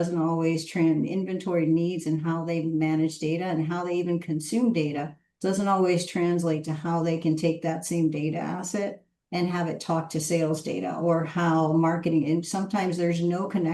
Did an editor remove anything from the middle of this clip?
no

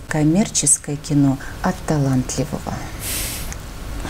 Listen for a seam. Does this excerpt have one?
no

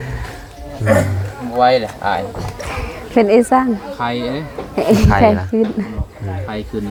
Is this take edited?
no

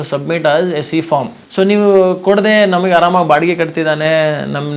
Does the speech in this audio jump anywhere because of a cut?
yes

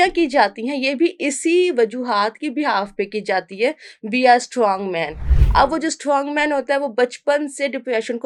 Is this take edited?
no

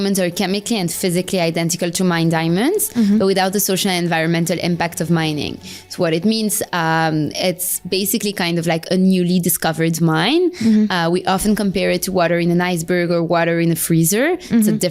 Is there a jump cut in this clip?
no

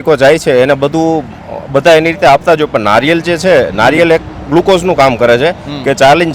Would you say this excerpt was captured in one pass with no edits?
yes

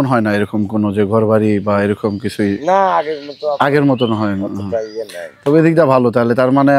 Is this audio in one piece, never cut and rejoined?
yes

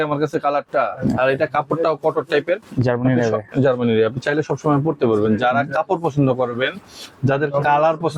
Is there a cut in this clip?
no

